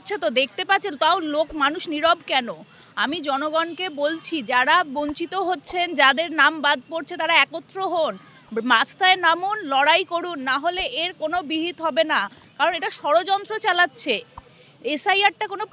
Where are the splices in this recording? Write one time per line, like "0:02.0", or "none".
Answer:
none